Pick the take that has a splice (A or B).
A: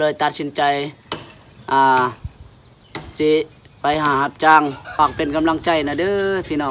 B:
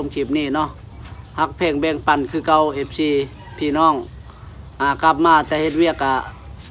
A